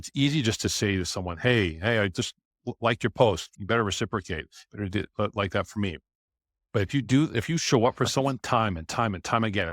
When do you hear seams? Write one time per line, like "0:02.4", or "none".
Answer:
0:03.5